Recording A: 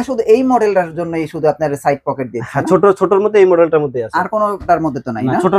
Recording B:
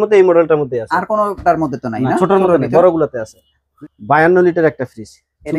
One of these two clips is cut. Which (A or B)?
B